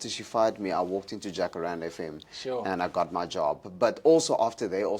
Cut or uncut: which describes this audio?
uncut